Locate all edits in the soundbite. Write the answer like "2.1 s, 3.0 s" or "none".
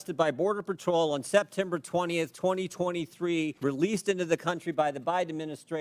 3.5 s